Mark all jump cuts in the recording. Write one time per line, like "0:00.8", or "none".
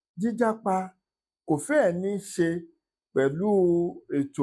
none